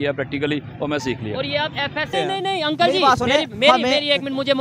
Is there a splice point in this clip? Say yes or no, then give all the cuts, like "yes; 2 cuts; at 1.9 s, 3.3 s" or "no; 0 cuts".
yes; 1 cut; at 2.1 s